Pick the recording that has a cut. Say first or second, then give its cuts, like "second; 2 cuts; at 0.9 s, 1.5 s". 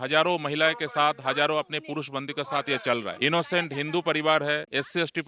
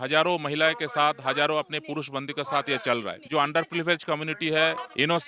first; 1 cut; at 3.1 s